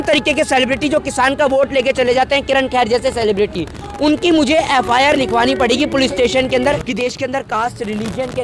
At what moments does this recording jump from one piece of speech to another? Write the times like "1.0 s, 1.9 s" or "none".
6.8 s